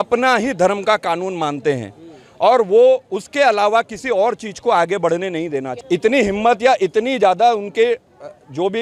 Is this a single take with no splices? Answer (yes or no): yes